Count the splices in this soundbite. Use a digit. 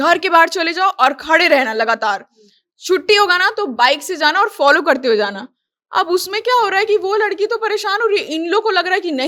0